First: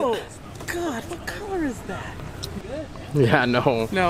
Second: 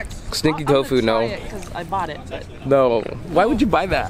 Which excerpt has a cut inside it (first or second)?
first